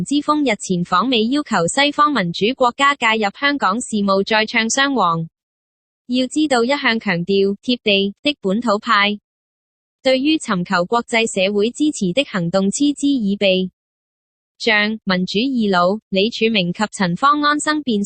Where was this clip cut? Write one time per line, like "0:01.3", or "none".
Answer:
0:15.8